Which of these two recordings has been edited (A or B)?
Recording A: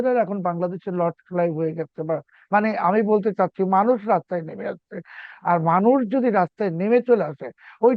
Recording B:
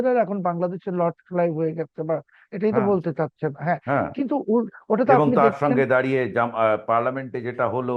A